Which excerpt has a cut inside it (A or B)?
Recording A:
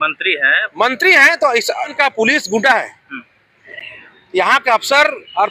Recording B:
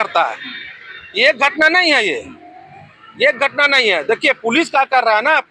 A